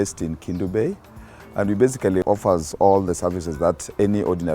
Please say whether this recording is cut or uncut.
cut